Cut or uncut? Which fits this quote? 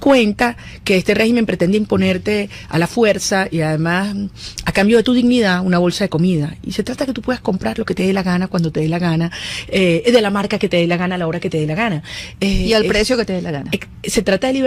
uncut